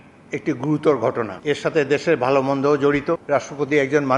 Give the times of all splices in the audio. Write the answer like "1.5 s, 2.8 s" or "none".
1.3 s, 3.2 s